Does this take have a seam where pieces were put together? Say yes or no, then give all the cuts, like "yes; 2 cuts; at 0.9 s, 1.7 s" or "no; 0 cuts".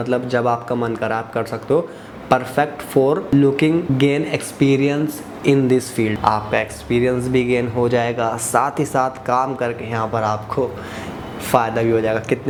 no; 0 cuts